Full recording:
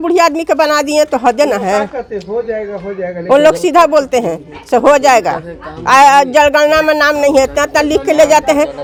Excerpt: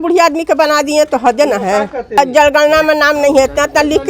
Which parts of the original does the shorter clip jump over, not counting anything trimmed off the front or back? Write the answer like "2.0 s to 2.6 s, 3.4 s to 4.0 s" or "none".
2.2 s to 6.2 s